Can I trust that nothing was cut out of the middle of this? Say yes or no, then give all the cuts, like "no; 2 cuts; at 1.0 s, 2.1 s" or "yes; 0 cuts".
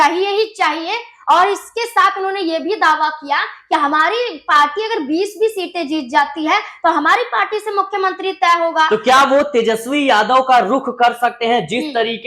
yes; 0 cuts